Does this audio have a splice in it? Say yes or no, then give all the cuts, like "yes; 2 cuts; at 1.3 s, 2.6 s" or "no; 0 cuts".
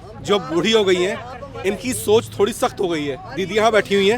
no; 0 cuts